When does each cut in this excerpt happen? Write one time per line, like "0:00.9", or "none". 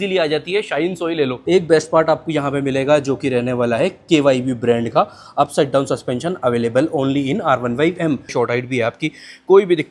0:01.4
0:08.3